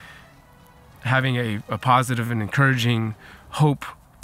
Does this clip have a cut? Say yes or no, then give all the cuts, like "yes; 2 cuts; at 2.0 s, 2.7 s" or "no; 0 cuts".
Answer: no; 0 cuts